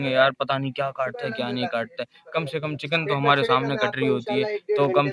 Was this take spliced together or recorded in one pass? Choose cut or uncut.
uncut